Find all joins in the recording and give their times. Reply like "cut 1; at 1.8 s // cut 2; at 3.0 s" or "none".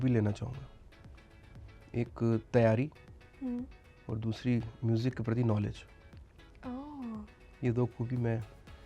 none